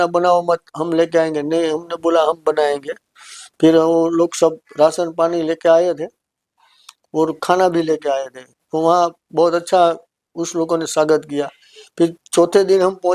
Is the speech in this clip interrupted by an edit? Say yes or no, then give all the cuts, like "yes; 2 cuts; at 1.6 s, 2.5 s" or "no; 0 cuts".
no; 0 cuts